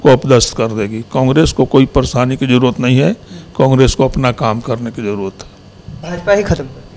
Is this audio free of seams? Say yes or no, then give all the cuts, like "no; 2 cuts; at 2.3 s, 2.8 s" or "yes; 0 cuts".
yes; 0 cuts